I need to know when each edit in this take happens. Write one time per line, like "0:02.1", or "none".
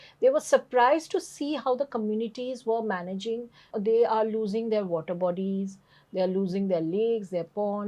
0:03.7